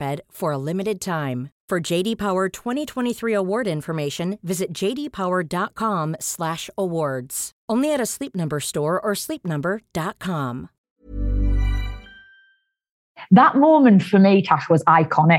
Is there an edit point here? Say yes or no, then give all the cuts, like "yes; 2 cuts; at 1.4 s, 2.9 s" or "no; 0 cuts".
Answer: yes; 2 cuts; at 10.9 s, 13.2 s